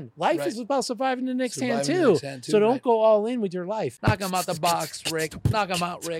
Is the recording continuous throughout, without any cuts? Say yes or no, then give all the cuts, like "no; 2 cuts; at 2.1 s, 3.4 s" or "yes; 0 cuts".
no; 1 cut; at 4.0 s